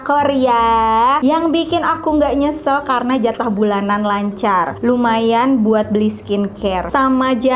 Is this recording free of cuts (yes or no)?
yes